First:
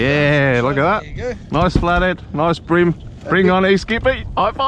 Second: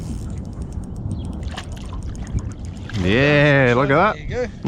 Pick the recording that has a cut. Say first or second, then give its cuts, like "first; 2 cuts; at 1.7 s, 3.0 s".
second; 1 cut; at 1.4 s